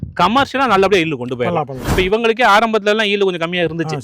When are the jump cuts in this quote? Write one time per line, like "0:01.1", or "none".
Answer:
0:01.9